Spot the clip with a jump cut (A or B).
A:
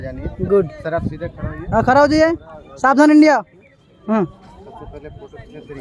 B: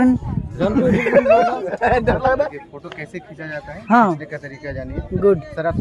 B